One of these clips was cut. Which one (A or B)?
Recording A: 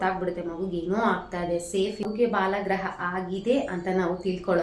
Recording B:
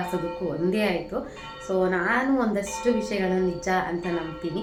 A